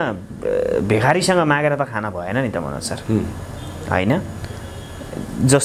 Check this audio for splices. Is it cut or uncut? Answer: uncut